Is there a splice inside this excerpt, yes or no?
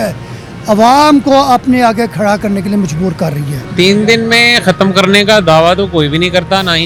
no